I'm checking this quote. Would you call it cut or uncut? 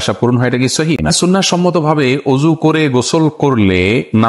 cut